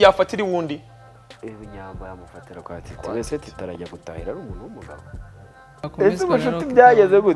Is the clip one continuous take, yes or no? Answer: no